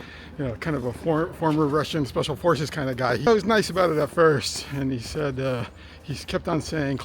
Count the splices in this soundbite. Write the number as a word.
one